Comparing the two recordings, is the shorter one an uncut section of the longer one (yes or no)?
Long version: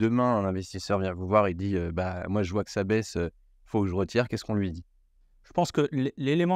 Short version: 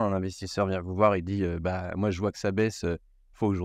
yes